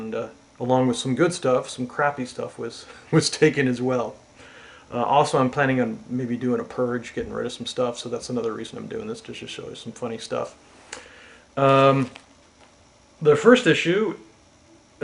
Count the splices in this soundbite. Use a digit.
1